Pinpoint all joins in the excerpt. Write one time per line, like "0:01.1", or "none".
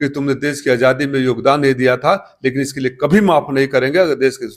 none